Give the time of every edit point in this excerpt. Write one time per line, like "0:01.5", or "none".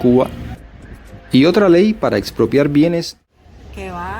0:03.2